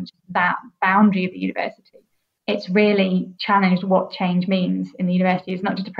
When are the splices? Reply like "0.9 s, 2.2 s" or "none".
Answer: 2.4 s, 3.3 s

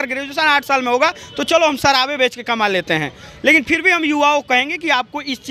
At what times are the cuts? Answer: none

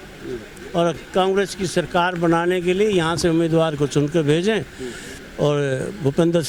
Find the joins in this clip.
none

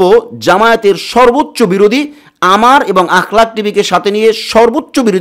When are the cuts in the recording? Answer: none

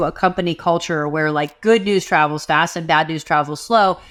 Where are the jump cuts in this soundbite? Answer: none

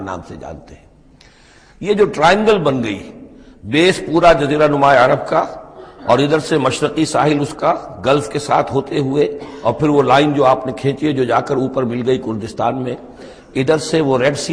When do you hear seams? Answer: none

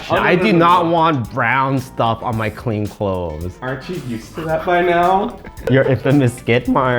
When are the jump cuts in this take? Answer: 5.6 s

